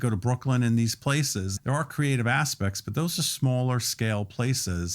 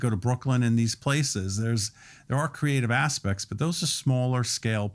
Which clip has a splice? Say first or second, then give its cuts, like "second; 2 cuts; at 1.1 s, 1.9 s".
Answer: first; 1 cut; at 1.5 s